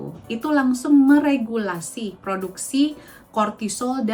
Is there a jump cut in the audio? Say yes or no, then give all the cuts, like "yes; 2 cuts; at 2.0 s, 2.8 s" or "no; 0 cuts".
no; 0 cuts